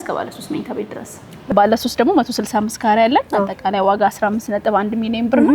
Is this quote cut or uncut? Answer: cut